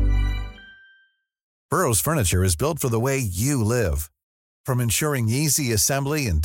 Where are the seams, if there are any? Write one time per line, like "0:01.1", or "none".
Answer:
0:01.5